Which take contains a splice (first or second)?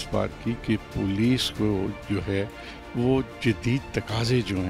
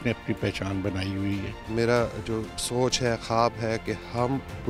second